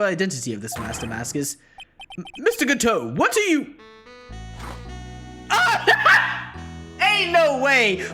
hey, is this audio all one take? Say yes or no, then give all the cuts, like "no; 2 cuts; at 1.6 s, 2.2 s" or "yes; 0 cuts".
yes; 0 cuts